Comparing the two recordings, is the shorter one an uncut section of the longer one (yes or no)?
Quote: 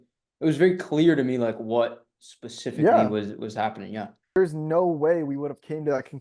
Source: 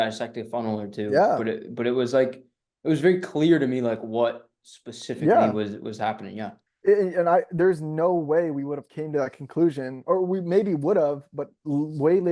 no